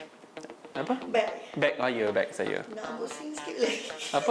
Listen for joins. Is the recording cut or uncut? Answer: uncut